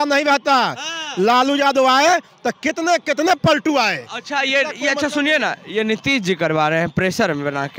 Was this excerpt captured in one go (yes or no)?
yes